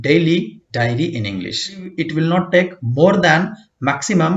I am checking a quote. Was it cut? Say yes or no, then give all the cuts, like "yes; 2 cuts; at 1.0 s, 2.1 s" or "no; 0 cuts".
yes; 1 cut; at 1.9 s